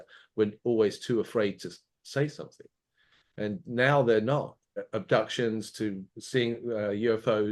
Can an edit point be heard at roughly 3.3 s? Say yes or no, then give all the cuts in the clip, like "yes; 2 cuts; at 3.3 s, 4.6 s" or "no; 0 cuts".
no; 1 cut; at 4.7 s